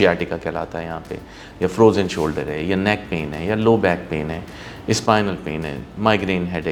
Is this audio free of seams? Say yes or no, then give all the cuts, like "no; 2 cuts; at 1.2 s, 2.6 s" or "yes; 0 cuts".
yes; 0 cuts